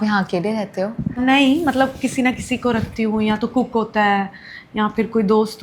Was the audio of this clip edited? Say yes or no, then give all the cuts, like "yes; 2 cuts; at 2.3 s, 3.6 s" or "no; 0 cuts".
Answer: no; 0 cuts